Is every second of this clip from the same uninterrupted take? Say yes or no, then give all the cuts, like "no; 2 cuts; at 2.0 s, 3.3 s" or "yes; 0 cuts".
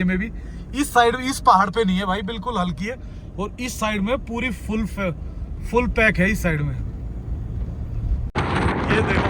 no; 1 cut; at 8.3 s